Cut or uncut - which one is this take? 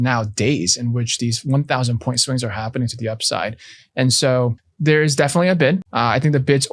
cut